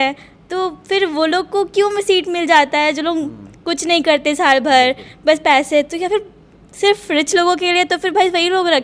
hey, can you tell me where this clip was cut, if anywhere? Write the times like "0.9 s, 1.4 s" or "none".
none